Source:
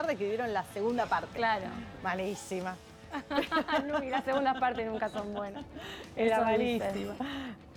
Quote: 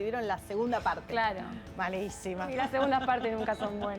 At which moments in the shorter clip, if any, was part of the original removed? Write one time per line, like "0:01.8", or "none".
0:02.5